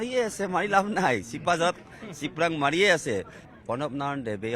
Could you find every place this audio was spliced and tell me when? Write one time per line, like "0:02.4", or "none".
0:03.4